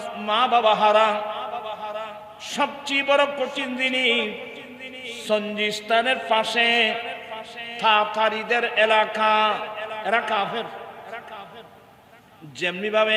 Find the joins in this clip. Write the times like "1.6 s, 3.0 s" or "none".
none